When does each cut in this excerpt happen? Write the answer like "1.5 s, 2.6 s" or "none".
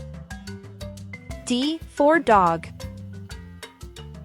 none